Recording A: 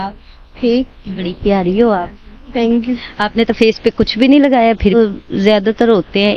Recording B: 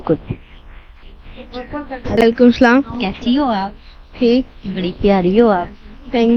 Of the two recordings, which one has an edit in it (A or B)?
A